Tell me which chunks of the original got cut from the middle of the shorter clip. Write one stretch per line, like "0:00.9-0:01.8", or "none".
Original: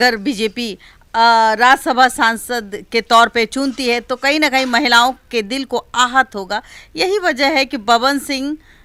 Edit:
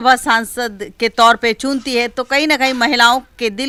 none